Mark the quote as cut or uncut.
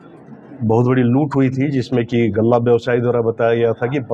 uncut